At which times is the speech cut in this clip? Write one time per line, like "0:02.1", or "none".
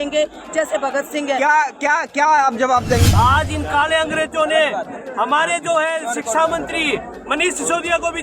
0:03.1